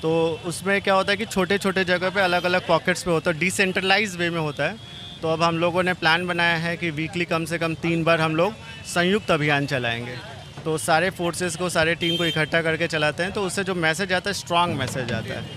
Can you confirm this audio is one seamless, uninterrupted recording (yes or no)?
yes